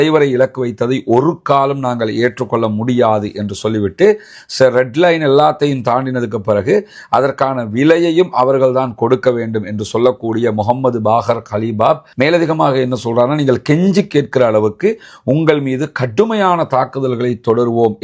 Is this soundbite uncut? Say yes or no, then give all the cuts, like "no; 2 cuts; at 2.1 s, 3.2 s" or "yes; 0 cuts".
yes; 0 cuts